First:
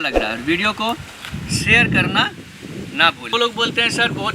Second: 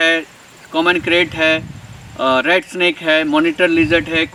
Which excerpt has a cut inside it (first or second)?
first